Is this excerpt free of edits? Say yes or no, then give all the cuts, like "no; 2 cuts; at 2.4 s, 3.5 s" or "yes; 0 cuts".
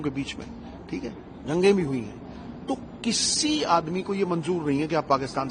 yes; 0 cuts